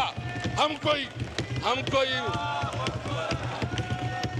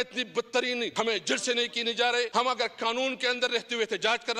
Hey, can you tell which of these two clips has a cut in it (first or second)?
second